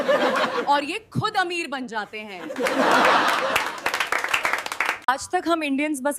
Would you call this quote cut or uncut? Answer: cut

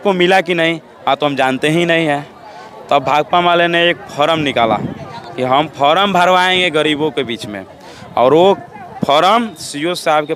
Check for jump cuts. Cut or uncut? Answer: uncut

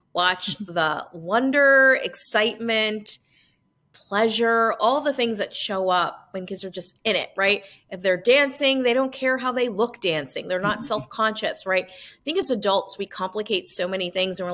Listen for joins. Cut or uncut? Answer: uncut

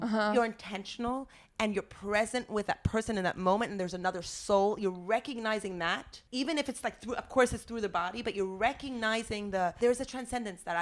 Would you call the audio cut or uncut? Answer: cut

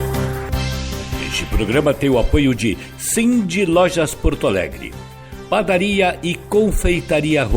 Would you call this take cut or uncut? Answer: cut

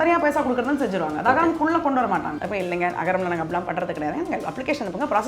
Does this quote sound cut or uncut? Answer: cut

